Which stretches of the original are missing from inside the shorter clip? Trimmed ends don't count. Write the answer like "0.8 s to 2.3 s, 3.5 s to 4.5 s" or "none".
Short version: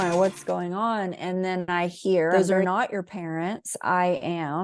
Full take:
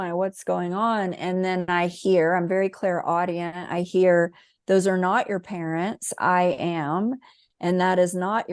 2.3 s to 4.7 s